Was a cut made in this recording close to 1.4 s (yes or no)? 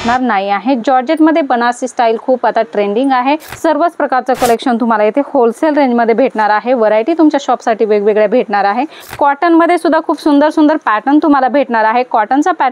no